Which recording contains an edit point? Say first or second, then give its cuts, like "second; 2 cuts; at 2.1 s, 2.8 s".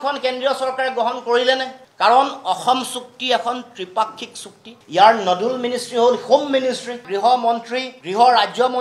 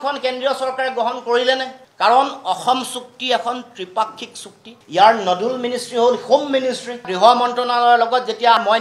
first; 1 cut; at 7.1 s